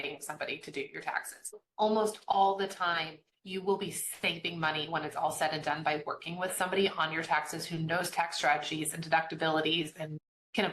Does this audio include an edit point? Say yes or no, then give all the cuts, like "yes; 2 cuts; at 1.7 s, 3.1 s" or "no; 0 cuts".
yes; 1 cut; at 1.5 s